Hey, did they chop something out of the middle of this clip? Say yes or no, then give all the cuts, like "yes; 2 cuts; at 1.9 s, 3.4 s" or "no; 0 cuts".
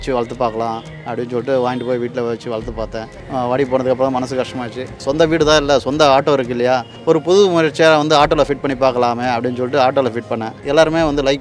yes; 4 cuts; at 3.2 s, 5.0 s, 6.9 s, 10.6 s